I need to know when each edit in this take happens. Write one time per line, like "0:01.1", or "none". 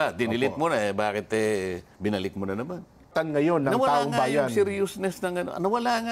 0:03.1